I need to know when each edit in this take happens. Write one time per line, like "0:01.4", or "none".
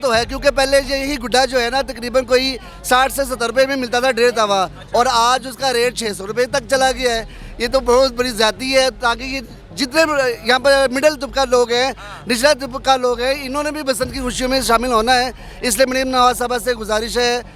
none